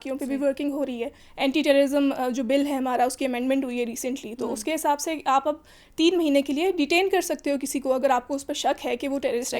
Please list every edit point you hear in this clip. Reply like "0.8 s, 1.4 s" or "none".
1.2 s